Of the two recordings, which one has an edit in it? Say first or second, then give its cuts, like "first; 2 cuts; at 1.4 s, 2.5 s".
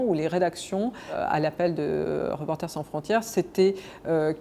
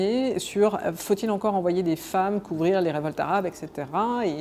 first; 1 cut; at 1.2 s